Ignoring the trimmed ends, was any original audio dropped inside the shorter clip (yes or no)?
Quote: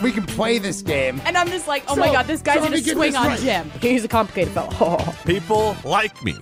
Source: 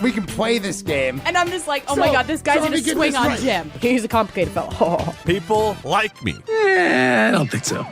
no